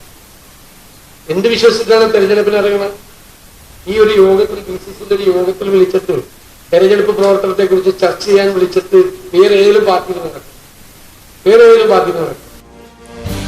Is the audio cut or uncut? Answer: cut